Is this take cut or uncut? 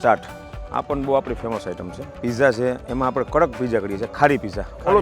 cut